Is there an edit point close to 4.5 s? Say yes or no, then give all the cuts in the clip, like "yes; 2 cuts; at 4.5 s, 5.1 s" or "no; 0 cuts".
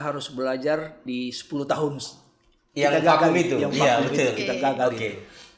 no; 1 cut; at 1.0 s